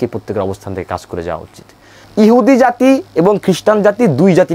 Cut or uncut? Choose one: cut